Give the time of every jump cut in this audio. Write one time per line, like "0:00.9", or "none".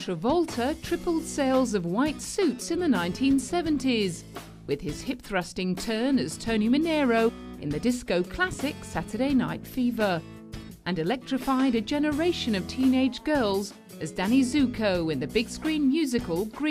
none

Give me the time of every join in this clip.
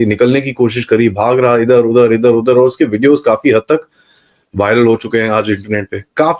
none

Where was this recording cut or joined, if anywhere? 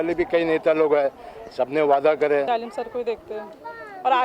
0:02.5

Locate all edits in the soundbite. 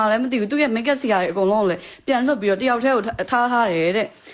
none

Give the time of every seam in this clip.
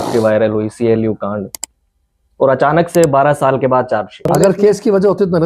0:04.3

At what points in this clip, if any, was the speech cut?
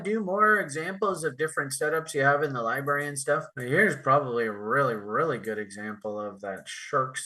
none

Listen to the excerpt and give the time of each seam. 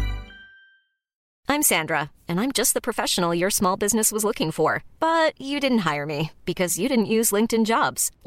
0:01.2

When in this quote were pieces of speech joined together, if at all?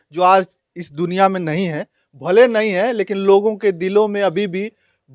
none

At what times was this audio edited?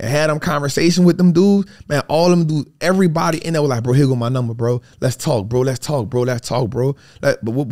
none

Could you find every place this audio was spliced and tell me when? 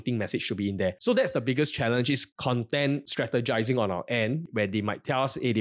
0:01.0
0:02.3

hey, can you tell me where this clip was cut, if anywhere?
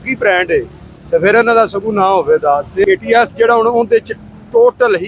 0:02.8

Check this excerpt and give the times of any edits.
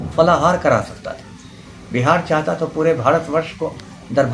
none

